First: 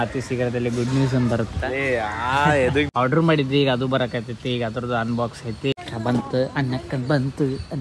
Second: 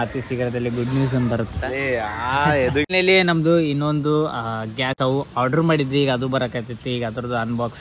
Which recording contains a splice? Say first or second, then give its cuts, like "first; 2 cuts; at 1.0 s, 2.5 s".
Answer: first; 2 cuts; at 2.9 s, 5.7 s